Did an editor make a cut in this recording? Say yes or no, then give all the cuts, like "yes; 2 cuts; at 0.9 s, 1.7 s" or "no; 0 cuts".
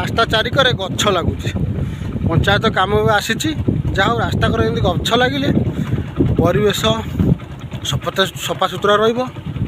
no; 0 cuts